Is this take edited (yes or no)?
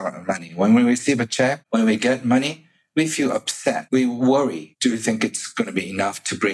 yes